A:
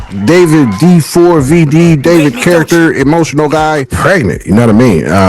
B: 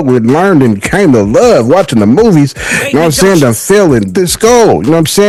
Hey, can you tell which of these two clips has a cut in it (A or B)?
A